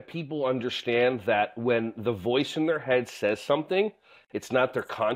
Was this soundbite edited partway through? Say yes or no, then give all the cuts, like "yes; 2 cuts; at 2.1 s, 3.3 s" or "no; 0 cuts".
no; 0 cuts